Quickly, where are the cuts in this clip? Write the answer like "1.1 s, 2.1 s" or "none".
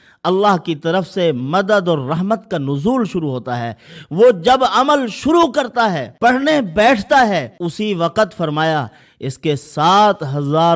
6.1 s, 7.6 s